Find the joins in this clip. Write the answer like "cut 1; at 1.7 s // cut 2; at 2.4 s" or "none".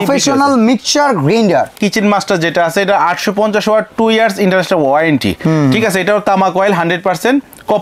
cut 1; at 1.7 s